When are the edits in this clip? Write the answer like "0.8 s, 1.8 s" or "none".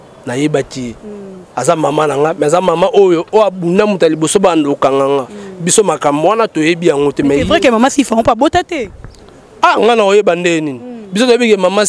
none